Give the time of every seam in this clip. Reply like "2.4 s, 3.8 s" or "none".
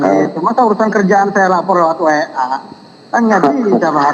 none